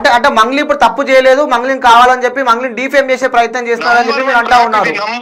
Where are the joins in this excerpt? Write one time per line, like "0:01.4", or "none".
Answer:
none